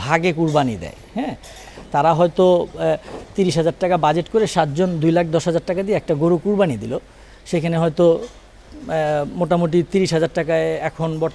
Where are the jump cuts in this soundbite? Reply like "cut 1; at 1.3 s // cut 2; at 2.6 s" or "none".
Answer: none

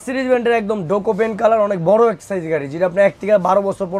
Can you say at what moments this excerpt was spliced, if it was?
none

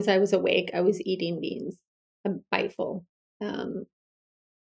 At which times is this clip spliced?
none

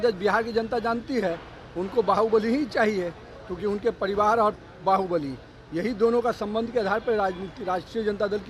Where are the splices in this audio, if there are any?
none

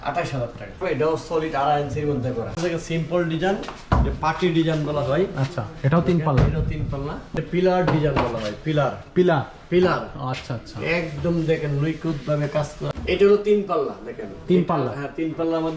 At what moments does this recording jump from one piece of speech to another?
cut 1; at 0.8 s // cut 2; at 2.6 s // cut 3; at 7.3 s // cut 4; at 12.8 s

